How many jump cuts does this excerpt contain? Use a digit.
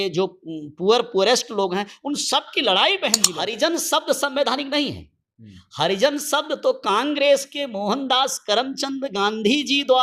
1